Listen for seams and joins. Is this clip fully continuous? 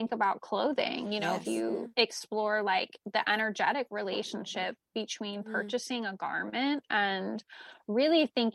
yes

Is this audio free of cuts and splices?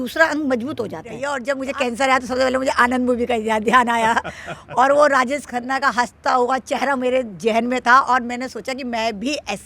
no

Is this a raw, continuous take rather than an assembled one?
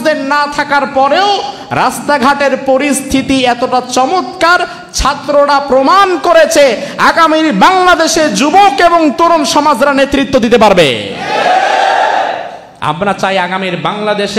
yes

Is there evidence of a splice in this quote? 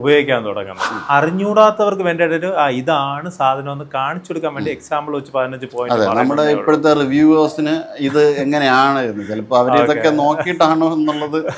yes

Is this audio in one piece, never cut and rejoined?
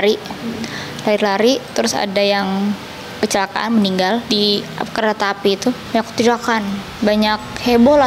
no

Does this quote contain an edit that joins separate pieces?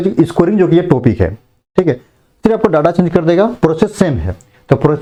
no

